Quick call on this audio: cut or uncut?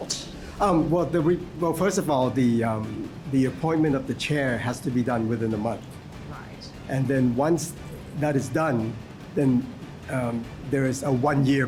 uncut